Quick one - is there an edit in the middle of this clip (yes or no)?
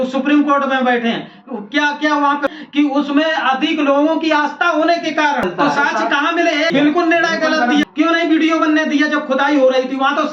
yes